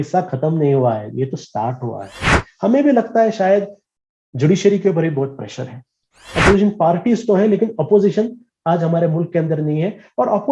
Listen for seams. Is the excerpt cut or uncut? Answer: cut